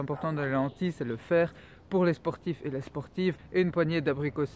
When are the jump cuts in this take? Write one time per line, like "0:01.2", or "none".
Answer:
0:03.4